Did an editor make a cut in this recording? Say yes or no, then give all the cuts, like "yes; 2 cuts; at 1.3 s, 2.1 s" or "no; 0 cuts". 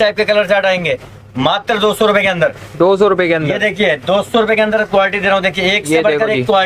no; 0 cuts